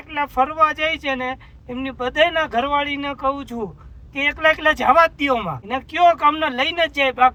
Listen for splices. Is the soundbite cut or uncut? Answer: uncut